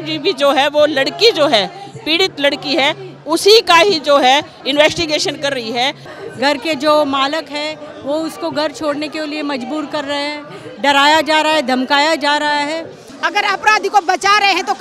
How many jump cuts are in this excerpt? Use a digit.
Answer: 2